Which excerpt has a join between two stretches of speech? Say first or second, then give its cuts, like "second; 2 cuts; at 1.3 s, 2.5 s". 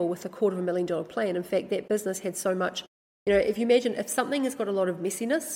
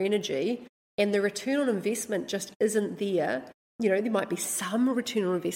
second; 1 cut; at 3.7 s